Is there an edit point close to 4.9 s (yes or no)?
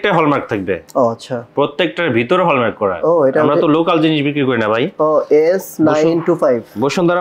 no